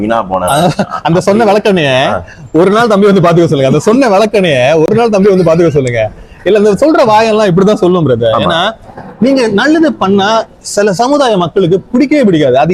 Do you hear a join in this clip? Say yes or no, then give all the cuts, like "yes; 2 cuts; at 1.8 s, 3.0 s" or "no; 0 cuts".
no; 0 cuts